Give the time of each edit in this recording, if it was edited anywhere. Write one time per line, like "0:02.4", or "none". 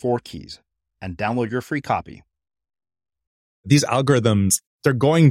0:03.7